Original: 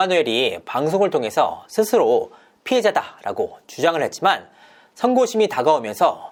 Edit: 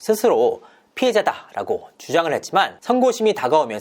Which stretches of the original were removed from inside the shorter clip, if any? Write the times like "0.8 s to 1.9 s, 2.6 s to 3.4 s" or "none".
4.4 s to 4.9 s